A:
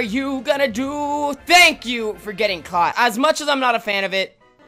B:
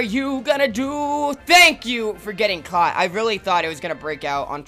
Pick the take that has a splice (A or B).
A